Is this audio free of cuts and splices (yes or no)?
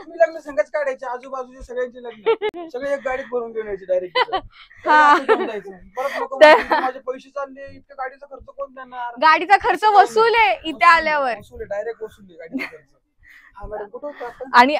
yes